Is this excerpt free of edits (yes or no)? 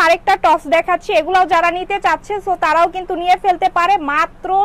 yes